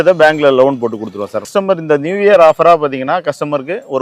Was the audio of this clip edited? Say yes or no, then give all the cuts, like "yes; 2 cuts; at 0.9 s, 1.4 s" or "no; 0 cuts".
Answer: yes; 1 cut; at 1.5 s